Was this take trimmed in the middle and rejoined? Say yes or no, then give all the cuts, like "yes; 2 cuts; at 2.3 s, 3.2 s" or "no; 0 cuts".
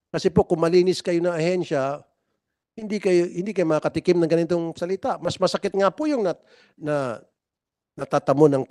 no; 0 cuts